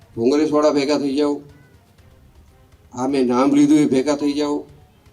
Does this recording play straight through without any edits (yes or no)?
yes